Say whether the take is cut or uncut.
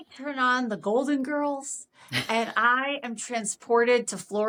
uncut